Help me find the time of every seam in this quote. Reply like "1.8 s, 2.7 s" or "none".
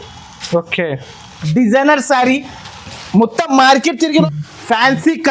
4.2 s